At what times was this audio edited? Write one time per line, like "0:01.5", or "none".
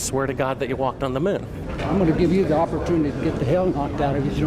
none